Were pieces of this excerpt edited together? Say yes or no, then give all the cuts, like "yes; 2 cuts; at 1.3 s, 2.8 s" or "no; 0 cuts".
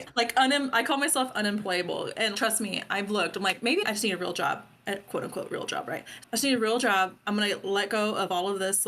yes; 2 cuts; at 3.8 s, 6.1 s